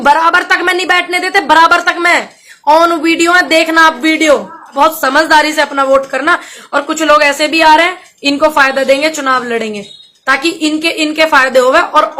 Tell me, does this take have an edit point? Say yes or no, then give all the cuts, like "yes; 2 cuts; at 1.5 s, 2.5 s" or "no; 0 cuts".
yes; 1 cut; at 4.7 s